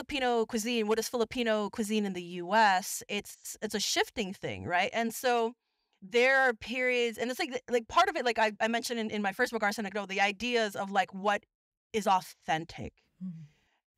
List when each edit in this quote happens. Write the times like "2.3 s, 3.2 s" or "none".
none